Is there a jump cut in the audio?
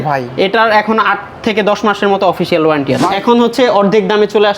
yes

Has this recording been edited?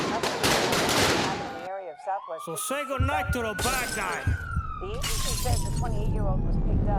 no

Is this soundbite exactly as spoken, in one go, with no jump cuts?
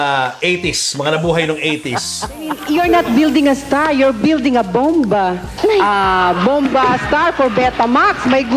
no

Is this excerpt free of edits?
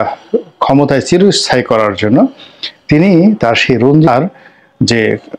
no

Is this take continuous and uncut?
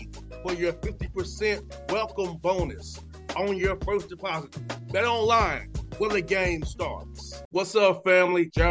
yes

